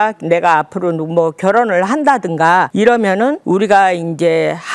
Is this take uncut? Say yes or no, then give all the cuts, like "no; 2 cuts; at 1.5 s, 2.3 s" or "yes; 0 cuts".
no; 2 cuts; at 2.7 s, 3.4 s